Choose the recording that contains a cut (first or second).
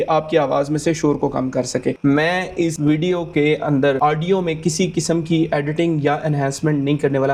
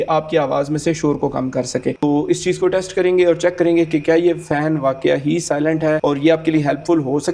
second